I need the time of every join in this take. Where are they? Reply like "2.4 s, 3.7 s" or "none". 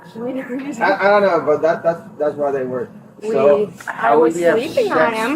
3.0 s